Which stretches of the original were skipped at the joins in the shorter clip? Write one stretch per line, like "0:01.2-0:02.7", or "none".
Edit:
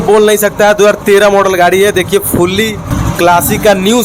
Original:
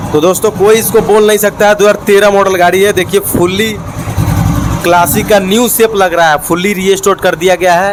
0:03.9-0:04.6